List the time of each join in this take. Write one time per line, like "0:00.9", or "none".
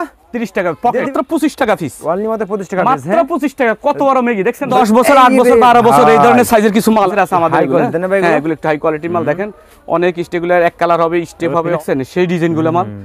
0:01.1
0:04.7
0:07.1
0:11.8